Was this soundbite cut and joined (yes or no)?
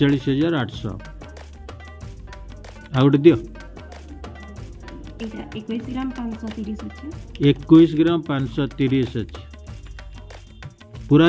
yes